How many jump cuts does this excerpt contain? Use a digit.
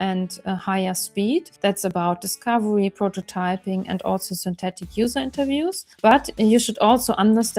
2